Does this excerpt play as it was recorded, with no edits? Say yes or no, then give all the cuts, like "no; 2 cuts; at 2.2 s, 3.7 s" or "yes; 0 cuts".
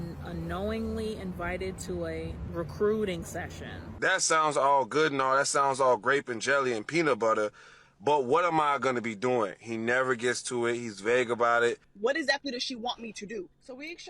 no; 3 cuts; at 2.4 s, 3.9 s, 11.9 s